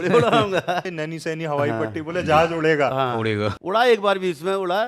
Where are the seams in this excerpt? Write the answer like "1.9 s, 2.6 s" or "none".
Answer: 1.0 s, 3.5 s